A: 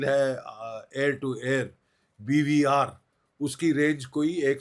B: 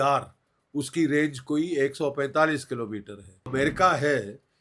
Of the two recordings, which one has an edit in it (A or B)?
B